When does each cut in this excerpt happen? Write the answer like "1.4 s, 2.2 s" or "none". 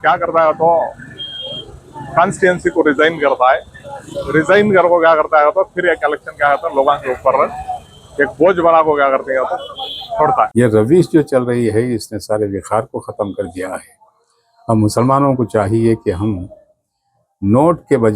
10.5 s